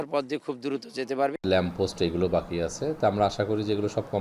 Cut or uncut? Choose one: cut